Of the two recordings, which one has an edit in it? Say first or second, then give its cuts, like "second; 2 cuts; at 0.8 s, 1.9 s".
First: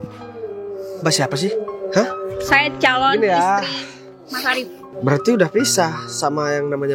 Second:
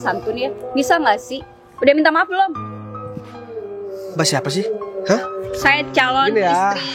first; 1 cut; at 4.8 s